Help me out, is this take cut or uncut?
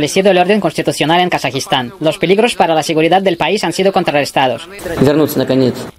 cut